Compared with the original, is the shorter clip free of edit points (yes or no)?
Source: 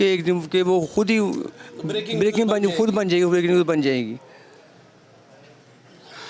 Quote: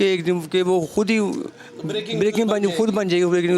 yes